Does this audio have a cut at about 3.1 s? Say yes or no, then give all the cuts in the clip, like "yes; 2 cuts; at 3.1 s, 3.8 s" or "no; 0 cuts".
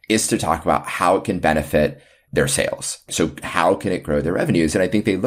yes; 1 cut; at 3.1 s